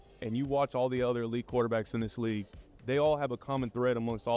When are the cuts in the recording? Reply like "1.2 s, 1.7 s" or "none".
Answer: 3.2 s